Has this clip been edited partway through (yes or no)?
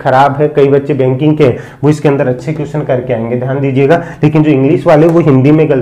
no